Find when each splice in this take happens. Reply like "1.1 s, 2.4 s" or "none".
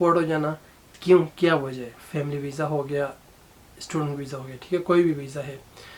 2.0 s